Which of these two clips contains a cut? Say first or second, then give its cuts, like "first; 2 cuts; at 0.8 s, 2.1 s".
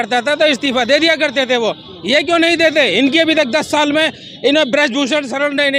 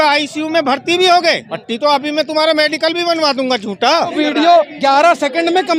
second; 2 cuts; at 1.5 s, 4.1 s